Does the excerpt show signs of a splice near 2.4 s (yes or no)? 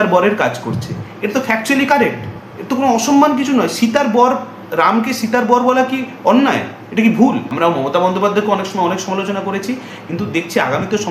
no